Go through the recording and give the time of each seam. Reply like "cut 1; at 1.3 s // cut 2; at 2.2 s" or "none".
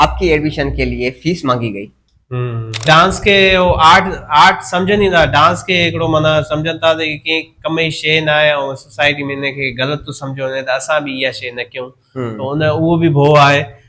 cut 1; at 2.8 s